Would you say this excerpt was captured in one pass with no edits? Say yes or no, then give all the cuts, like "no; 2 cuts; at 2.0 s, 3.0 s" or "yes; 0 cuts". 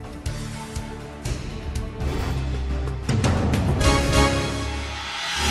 no; 1 cut; at 1.0 s